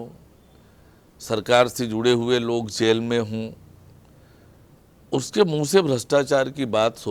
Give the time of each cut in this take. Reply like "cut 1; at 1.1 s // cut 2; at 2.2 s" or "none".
none